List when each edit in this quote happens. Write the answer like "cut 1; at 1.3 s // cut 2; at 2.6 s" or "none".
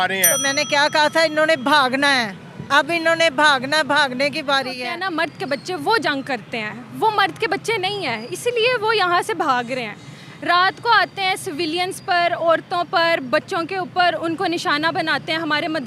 cut 1; at 4.9 s